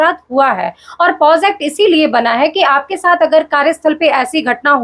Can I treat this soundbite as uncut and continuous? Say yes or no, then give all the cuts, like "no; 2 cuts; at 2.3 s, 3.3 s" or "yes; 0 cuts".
yes; 0 cuts